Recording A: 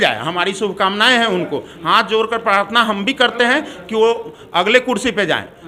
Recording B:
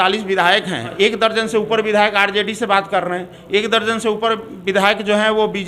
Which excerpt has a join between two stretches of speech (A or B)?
B